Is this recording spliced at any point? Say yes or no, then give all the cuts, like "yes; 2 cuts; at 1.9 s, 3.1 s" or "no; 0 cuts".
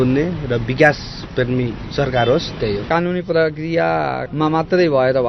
yes; 1 cut; at 2.8 s